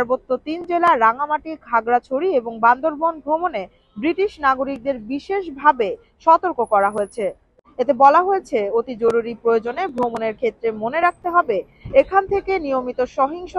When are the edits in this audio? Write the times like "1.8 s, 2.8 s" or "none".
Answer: none